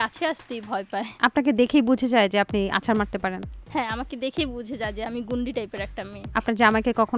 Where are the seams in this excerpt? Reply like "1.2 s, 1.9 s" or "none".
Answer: none